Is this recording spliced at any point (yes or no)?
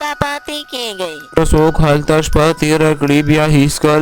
yes